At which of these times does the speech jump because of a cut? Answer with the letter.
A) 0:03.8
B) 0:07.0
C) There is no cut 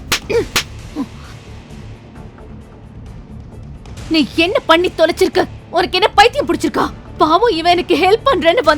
B